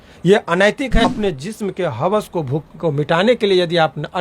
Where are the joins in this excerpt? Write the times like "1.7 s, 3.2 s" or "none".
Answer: 1.0 s